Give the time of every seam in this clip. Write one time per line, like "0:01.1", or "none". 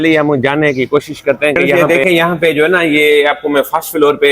0:01.7